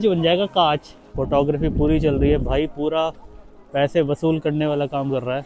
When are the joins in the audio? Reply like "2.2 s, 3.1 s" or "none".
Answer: 1.0 s